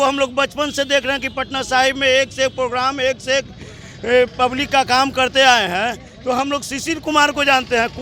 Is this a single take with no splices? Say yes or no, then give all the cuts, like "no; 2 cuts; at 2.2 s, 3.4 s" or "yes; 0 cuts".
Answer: yes; 0 cuts